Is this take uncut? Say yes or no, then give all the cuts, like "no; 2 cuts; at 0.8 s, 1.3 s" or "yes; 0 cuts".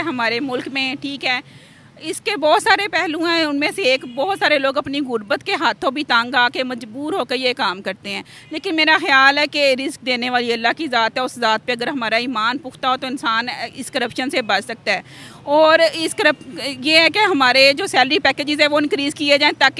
yes; 0 cuts